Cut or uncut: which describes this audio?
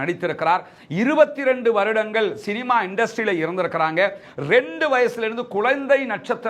uncut